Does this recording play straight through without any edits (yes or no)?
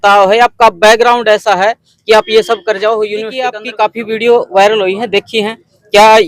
no